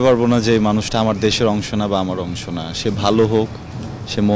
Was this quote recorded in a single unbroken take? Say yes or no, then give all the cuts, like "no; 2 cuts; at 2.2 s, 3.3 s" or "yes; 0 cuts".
yes; 0 cuts